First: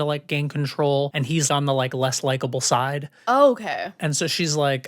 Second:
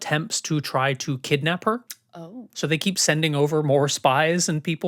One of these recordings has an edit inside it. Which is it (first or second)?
first